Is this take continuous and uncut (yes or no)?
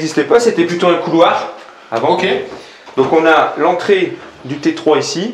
yes